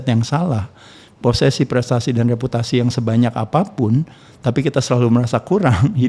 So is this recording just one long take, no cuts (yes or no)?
yes